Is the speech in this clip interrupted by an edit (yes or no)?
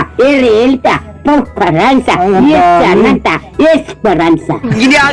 no